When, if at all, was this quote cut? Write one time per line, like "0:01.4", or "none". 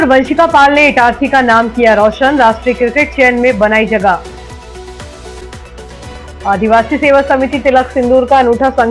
none